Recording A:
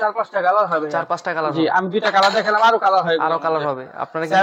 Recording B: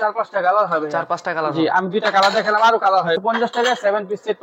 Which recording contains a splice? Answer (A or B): B